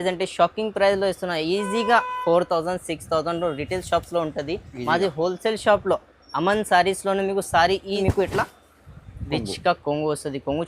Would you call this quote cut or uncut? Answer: cut